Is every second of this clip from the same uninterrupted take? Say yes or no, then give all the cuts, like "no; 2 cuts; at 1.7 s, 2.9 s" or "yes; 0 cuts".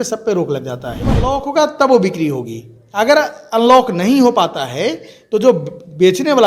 no; 1 cut; at 1.2 s